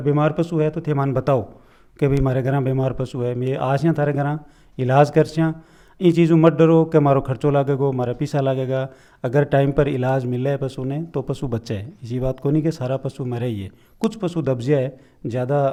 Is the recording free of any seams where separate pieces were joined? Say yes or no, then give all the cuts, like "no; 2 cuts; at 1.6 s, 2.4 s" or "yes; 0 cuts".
yes; 0 cuts